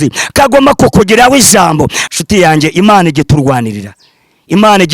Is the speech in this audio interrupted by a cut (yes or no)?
yes